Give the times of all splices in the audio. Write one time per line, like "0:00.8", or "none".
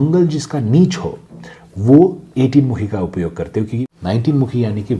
0:03.9